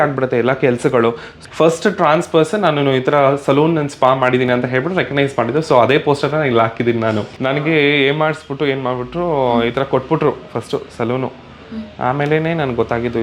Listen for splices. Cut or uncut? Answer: cut